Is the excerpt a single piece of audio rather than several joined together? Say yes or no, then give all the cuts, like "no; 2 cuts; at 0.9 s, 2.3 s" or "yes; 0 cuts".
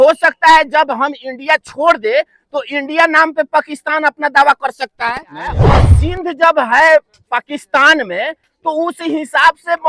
no; 1 cut; at 5.9 s